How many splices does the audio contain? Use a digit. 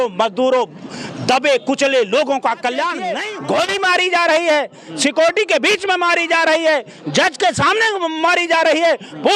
1